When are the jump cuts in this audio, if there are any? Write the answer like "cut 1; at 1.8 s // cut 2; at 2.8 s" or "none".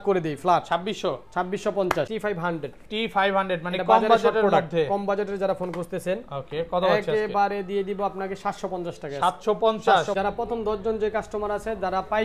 cut 1; at 2.1 s // cut 2; at 10.1 s